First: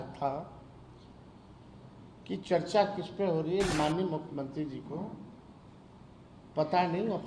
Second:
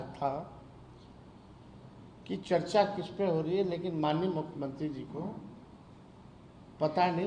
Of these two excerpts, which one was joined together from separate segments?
first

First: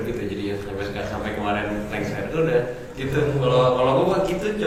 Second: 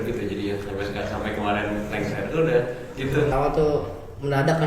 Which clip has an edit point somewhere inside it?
second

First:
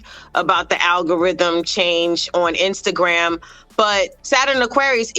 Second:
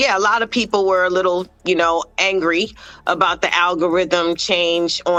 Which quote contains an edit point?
first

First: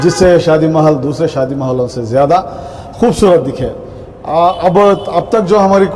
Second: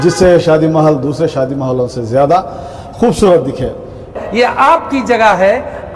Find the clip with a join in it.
second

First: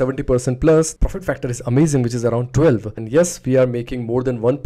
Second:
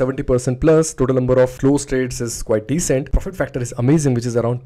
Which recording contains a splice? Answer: first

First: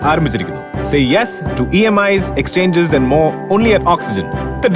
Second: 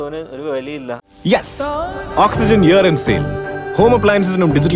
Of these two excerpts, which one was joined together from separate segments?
second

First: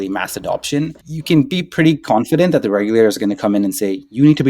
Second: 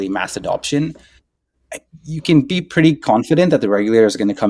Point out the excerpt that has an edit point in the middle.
first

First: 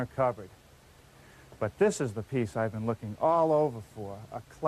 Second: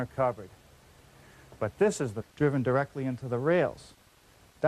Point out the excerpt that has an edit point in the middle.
first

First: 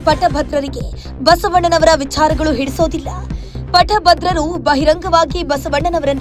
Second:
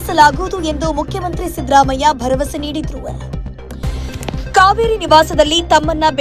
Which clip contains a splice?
second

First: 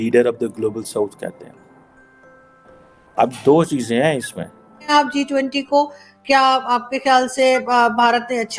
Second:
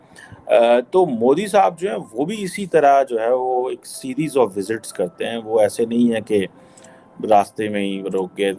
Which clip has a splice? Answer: first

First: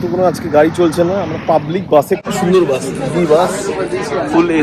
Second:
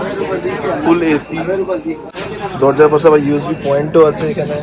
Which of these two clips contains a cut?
first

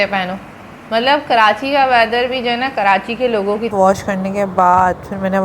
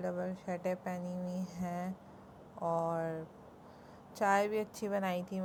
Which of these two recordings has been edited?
first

